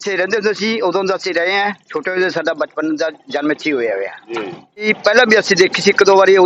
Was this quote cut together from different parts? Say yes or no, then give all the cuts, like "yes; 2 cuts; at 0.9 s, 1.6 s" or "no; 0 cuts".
no; 0 cuts